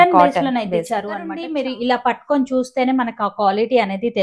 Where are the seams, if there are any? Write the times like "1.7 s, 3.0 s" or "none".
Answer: 1.4 s